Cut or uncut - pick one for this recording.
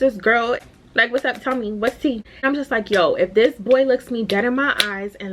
cut